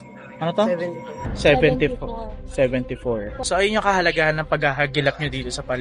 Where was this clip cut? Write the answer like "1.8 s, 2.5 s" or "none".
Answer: 3.3 s